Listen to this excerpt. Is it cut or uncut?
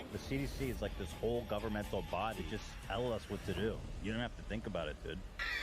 uncut